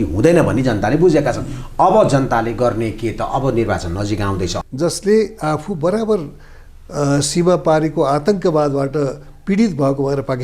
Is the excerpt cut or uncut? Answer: cut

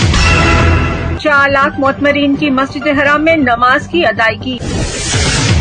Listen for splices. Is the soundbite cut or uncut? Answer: cut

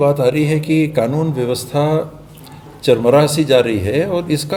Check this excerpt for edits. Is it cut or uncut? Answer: uncut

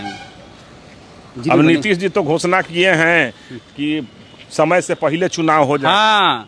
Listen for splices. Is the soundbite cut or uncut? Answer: uncut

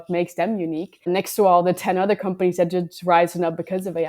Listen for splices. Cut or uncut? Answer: cut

